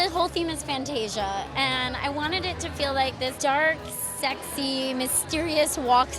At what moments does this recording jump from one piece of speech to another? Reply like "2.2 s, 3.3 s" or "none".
3.3 s